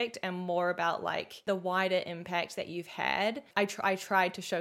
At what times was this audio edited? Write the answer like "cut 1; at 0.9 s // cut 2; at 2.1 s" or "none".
cut 1; at 1.4 s // cut 2; at 3.5 s